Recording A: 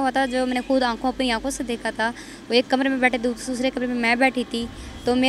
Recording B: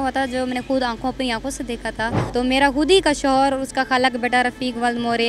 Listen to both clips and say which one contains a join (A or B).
B